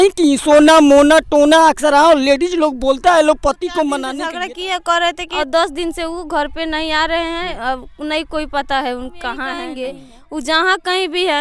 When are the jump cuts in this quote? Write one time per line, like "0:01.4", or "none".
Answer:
0:04.2
0:05.3
0:09.7